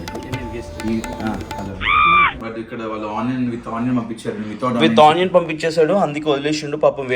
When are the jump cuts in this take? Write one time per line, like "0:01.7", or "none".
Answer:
0:02.4